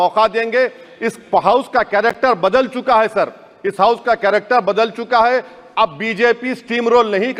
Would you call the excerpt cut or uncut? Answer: uncut